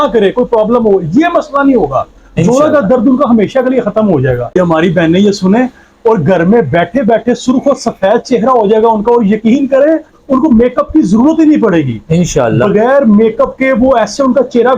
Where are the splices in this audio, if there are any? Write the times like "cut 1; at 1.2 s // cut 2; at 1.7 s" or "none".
cut 1; at 4.6 s